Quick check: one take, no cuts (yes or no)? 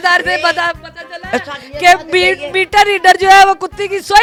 yes